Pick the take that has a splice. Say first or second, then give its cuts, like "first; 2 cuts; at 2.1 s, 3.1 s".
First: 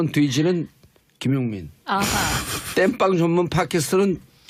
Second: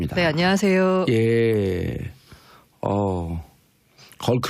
second; 1 cut; at 1.5 s